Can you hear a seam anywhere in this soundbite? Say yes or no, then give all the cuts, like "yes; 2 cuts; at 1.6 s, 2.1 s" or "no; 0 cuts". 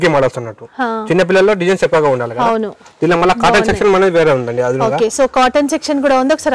no; 0 cuts